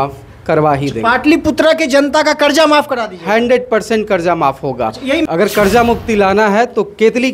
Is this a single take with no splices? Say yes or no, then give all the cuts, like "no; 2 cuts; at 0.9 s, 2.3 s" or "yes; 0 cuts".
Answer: no; 1 cut; at 5.3 s